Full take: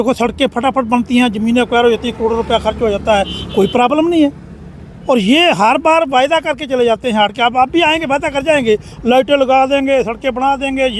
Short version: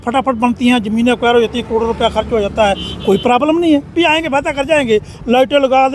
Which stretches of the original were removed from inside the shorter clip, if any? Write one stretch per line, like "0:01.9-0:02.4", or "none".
0:04.4-0:07.7